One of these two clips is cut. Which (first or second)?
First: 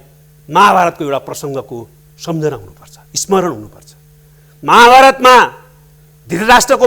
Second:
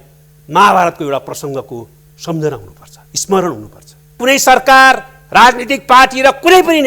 second